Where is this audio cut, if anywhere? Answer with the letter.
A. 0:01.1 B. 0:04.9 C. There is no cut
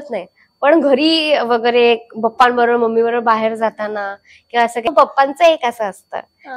B